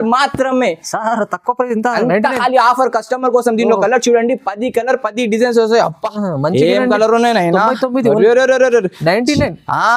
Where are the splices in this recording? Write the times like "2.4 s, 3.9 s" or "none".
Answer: none